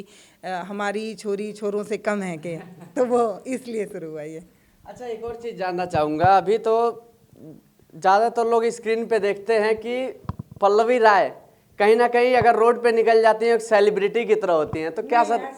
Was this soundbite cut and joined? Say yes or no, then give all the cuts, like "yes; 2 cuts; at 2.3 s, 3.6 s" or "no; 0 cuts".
no; 0 cuts